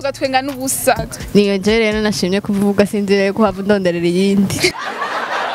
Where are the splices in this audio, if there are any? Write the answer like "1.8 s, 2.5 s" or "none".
1.1 s

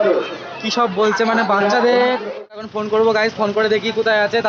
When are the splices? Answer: 2.7 s

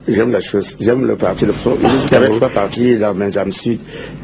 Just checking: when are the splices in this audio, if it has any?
2.0 s

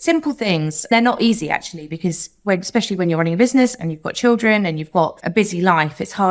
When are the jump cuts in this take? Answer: 0.9 s, 5.2 s

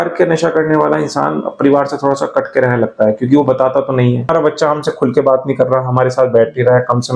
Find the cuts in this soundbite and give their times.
4.3 s

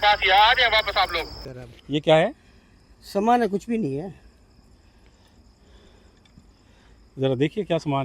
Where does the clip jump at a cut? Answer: 1.3 s

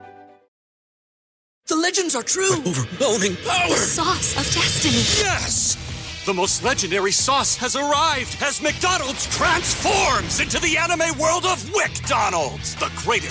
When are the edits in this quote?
none

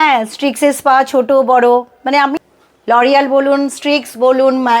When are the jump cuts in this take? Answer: 2.4 s

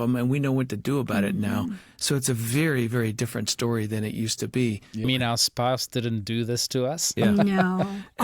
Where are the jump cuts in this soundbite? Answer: 5.0 s

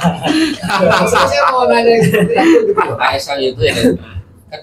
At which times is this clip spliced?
none

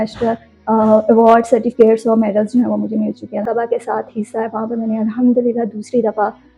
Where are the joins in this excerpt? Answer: 3.4 s

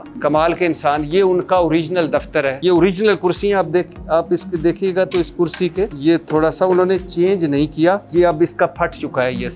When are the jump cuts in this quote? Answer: 2.6 s, 5.9 s, 8.0 s

